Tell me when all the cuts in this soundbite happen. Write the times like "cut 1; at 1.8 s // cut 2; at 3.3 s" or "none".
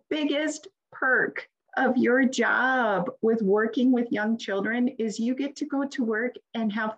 none